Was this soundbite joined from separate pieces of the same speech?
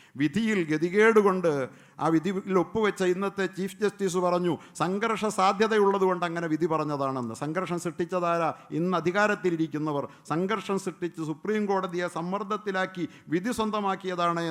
no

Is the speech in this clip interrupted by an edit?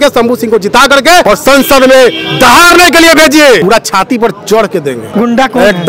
yes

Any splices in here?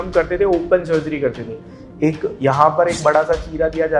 no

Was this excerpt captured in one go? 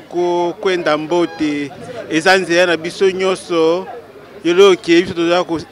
yes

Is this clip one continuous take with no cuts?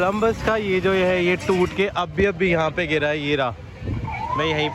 yes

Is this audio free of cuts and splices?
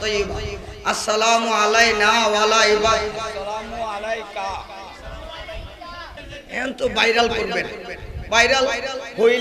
no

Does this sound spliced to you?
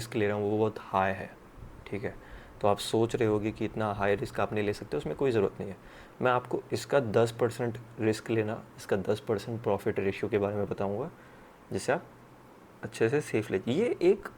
no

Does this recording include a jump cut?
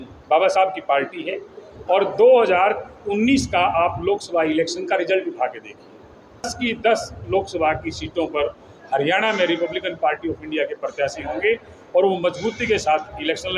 yes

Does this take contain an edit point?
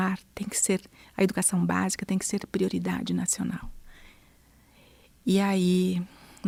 no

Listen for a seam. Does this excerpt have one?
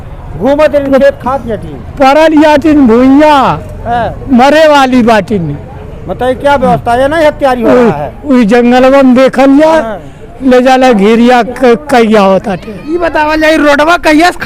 no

